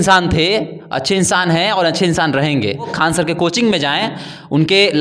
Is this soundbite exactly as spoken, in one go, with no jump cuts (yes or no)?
no